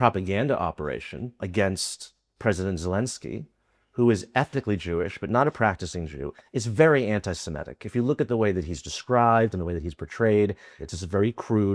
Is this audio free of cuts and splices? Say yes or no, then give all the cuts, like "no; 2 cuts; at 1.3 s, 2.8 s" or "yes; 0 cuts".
no; 3 cuts; at 1.4 s, 6.2 s, 10.7 s